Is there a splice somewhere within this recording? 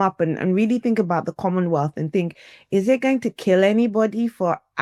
no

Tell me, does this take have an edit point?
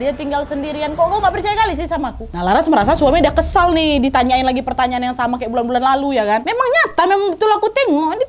yes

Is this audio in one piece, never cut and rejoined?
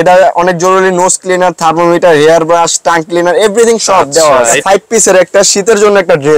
no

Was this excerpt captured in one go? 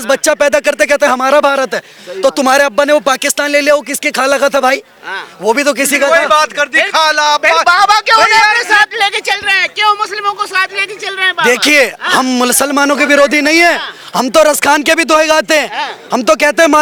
yes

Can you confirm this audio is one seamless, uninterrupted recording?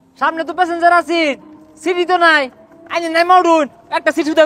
yes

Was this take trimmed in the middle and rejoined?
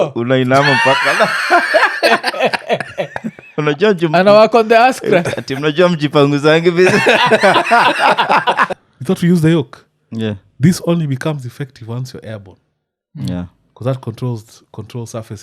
yes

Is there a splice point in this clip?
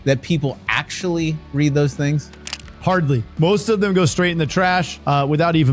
no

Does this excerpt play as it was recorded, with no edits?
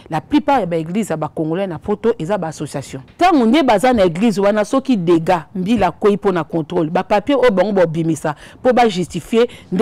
no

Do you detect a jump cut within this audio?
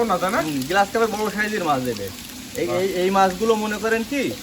no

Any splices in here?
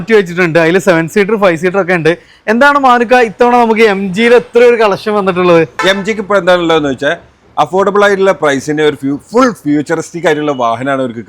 yes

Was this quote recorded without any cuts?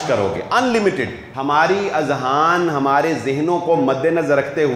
no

